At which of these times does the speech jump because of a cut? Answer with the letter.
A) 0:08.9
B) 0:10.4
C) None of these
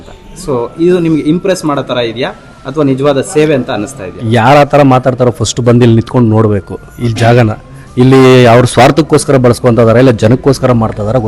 C